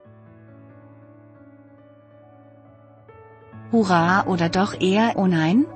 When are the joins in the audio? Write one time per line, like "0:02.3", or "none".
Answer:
0:03.7